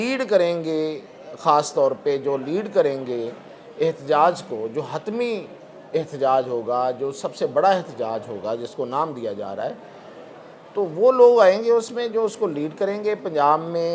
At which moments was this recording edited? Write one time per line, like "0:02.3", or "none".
none